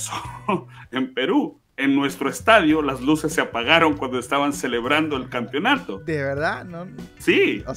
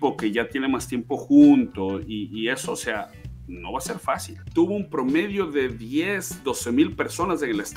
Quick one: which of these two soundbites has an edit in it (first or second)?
second